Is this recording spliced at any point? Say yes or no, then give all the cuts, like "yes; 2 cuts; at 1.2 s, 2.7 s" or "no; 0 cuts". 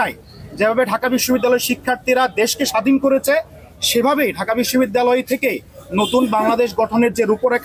no; 0 cuts